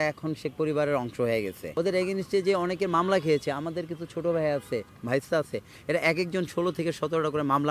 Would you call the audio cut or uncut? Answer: cut